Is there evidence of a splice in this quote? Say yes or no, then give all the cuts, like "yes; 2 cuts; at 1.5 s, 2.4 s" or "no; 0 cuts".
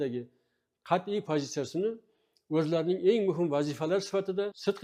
no; 0 cuts